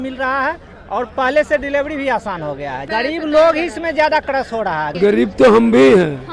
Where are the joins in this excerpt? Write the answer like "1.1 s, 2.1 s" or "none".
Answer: 2.8 s, 4.9 s